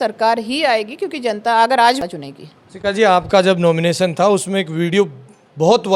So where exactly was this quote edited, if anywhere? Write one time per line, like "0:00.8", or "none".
0:02.1